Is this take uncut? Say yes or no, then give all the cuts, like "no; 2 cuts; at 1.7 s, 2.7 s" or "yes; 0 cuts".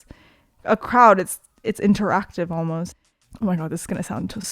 no; 1 cut; at 2.9 s